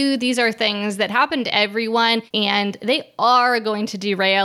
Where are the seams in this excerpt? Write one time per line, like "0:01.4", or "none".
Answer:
0:02.3